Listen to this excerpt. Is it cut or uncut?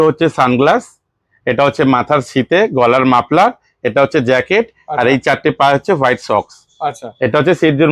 uncut